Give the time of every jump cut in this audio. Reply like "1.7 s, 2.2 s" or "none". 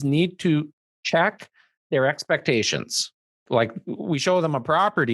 3.4 s